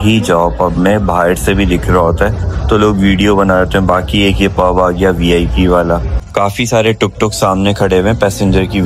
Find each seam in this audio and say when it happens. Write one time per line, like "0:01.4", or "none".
0:06.2